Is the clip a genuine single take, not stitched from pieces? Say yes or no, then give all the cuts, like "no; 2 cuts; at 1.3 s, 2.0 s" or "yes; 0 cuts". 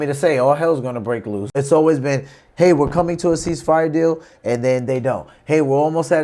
no; 1 cut; at 1.5 s